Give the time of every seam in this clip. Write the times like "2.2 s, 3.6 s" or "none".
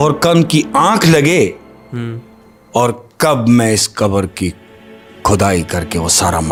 none